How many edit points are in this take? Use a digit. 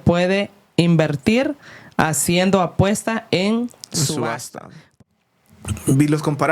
1